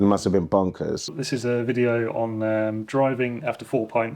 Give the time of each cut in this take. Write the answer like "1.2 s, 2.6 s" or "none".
1.2 s

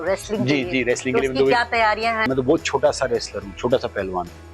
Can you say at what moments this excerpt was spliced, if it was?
2.3 s

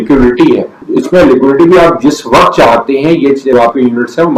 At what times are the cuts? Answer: none

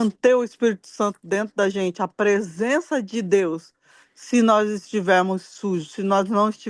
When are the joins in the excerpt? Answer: none

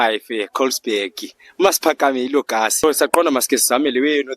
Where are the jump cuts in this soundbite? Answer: 2.8 s

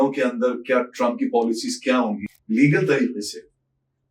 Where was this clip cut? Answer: 2.3 s

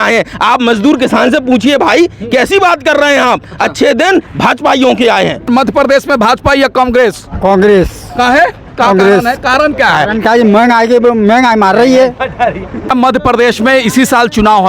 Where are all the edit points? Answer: 5.5 s, 12.9 s

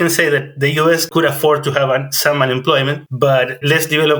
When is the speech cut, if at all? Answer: 1.1 s, 3.0 s

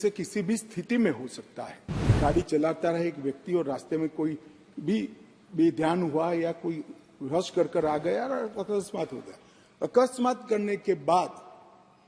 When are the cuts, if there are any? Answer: 2.2 s

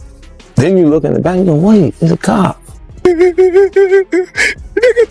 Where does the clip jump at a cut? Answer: 3.0 s

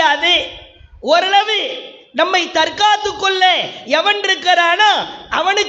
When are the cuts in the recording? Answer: none

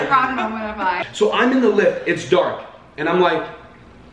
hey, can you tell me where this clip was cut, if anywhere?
1.1 s

